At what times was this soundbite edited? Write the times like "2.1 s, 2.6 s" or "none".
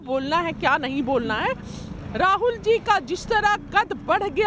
none